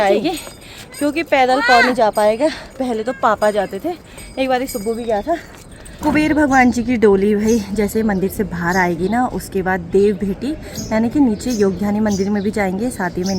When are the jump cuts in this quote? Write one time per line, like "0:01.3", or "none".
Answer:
0:06.0